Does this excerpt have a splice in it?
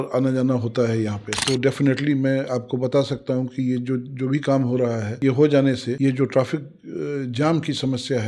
yes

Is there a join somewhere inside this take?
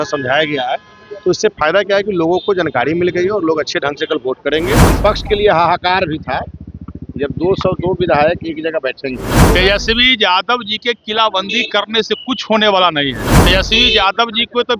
yes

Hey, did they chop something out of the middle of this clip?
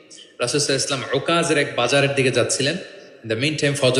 no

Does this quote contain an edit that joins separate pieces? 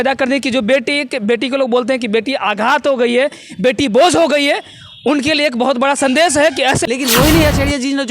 yes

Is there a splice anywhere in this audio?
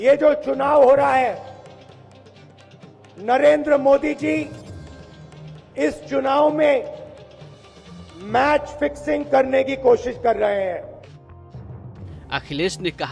yes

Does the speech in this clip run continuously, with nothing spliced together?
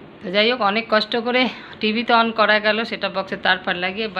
yes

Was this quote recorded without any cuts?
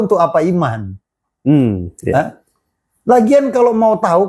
yes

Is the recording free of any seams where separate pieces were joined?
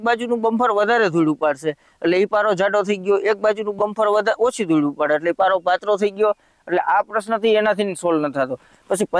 yes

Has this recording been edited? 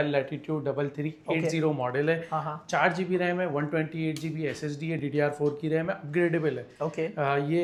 no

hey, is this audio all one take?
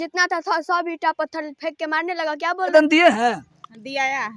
no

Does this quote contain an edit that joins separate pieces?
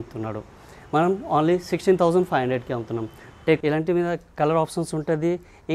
yes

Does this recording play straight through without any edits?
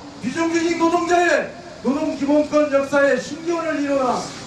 no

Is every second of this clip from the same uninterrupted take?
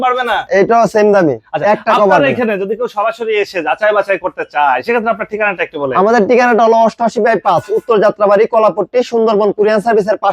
yes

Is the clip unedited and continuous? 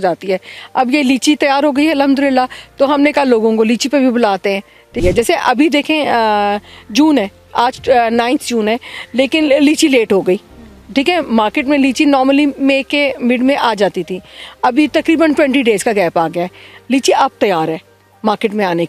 no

